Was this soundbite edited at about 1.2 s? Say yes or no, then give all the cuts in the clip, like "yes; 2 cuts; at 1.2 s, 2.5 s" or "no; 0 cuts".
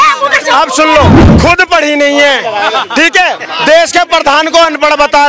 yes; 1 cut; at 1.2 s